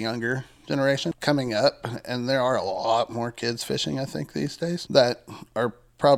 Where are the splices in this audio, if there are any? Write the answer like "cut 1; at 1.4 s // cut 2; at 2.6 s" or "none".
cut 1; at 1.1 s // cut 2; at 4.8 s